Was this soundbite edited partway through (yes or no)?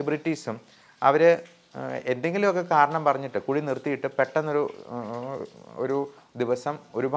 no